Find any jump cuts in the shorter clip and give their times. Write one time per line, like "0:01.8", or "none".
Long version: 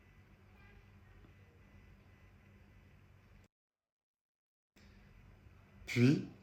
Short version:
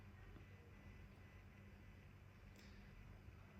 0:02.6